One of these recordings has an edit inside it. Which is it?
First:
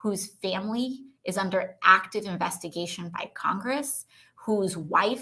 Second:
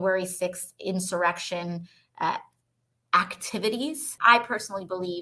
second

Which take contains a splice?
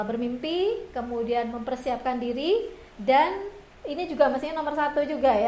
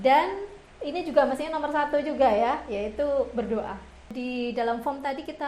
second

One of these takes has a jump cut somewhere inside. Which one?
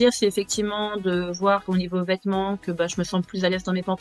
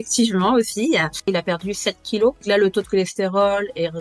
second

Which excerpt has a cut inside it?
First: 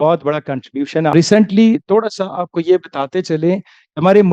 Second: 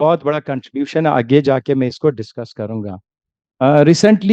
first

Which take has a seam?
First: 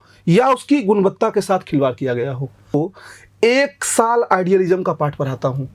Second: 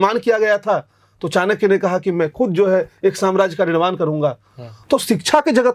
first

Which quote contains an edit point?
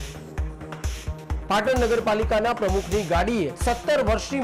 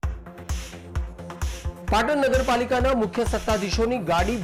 first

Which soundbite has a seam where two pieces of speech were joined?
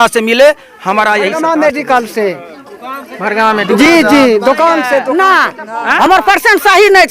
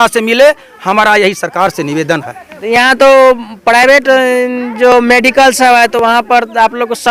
first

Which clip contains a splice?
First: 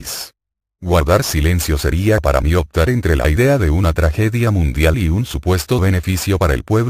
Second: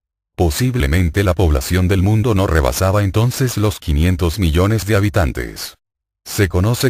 first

